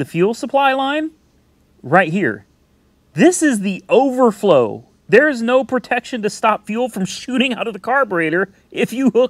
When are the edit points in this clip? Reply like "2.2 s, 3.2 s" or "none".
none